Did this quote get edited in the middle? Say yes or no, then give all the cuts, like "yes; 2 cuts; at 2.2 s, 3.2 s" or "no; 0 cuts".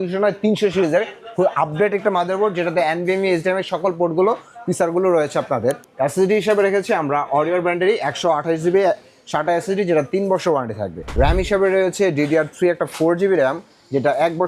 yes; 2 cuts; at 5.9 s, 11.0 s